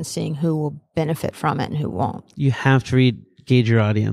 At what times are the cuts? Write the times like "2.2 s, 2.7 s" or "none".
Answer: none